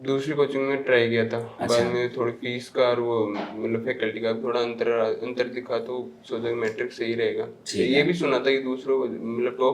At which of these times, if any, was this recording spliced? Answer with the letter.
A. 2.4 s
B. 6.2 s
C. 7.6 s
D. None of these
D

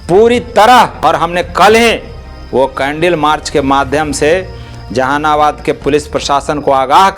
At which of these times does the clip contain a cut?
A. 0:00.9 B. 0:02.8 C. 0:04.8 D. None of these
A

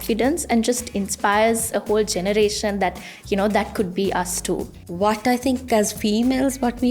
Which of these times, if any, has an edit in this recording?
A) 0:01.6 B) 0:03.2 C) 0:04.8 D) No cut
C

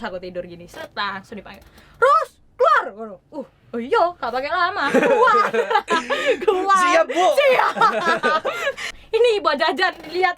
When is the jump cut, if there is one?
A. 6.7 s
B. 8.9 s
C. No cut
B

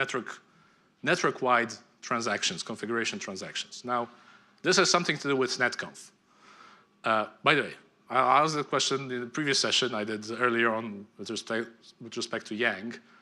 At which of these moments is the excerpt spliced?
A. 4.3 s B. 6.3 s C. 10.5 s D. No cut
C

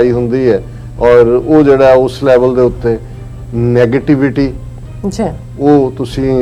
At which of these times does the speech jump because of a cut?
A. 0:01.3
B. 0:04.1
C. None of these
C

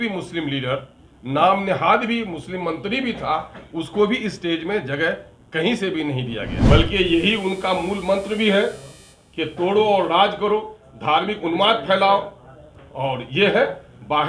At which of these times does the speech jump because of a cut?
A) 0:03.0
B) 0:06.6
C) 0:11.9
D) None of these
B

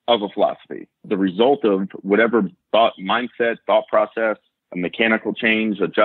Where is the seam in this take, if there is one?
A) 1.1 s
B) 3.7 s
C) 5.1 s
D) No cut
A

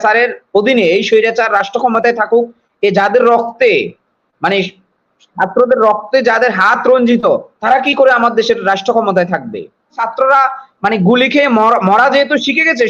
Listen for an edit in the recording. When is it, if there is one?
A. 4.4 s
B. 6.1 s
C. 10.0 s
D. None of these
C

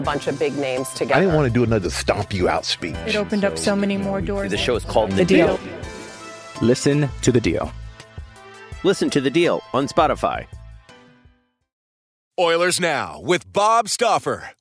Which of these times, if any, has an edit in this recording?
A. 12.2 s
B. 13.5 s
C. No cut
A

